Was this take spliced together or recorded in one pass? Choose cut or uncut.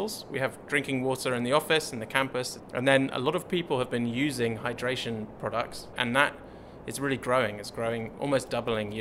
cut